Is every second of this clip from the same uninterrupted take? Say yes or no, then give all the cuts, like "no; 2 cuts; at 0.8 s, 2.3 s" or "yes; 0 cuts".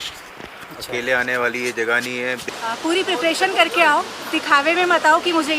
no; 1 cut; at 2.5 s